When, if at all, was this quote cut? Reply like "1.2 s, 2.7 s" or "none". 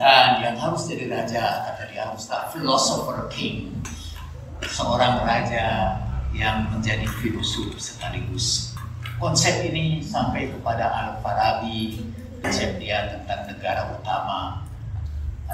8.8 s